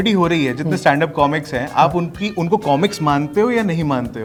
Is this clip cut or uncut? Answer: uncut